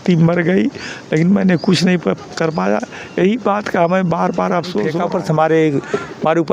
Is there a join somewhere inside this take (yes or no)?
yes